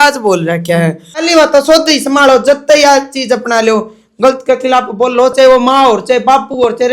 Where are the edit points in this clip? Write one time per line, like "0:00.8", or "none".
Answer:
0:01.2